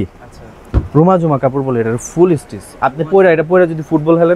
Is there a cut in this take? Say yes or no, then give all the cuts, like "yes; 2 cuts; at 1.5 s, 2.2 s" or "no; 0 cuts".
no; 0 cuts